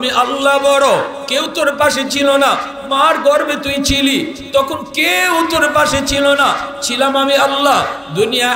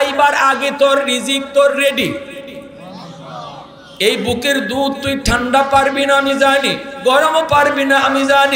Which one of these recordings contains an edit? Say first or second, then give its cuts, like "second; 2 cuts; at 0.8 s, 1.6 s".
second; 2 cuts; at 2.8 s, 3.8 s